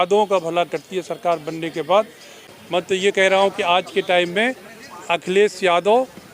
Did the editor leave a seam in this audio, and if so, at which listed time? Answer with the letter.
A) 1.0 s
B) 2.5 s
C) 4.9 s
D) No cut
B